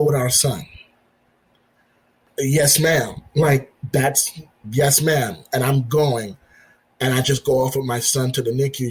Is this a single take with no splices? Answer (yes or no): no